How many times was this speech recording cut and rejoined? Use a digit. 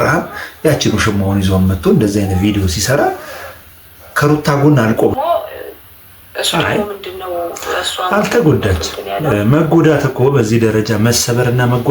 1